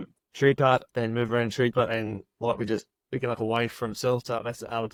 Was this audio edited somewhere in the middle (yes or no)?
no